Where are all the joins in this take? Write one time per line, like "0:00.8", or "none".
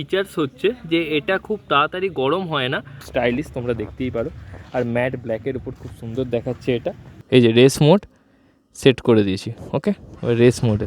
0:03.0
0:07.1